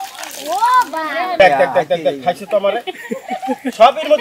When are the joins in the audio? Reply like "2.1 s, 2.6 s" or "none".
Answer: 1.4 s